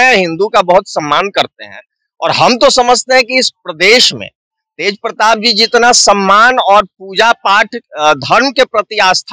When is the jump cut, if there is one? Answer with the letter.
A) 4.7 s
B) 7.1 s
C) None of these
C